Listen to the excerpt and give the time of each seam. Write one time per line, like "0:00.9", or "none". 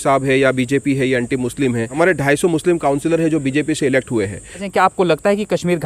0:01.9
0:04.6